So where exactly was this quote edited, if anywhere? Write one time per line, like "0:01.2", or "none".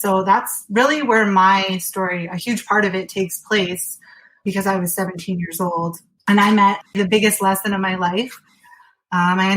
0:04.4
0:06.1
0:06.8